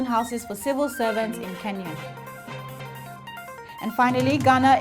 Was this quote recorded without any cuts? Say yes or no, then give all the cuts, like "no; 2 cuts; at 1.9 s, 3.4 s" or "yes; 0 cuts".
no; 1 cut; at 2.8 s